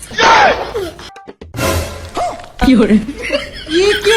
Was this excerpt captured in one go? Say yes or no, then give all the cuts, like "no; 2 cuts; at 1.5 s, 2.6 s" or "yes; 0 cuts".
no; 1 cut; at 1.0 s